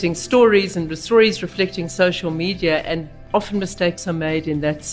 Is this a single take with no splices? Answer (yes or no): no